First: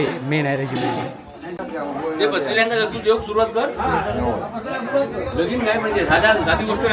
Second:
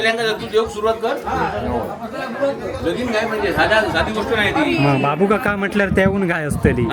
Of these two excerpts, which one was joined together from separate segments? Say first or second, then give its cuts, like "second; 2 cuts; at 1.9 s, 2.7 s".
first; 1 cut; at 1.6 s